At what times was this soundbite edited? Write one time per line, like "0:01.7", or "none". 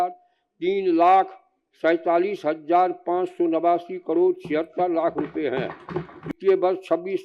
0:06.3